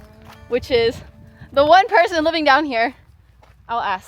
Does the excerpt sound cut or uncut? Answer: uncut